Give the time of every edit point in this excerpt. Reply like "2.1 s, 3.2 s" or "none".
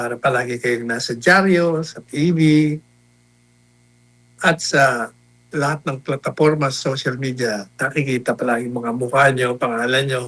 none